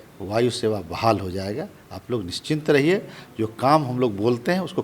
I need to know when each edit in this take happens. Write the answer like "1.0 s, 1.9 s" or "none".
none